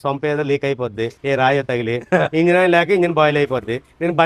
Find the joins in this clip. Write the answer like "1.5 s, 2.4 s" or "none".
1.2 s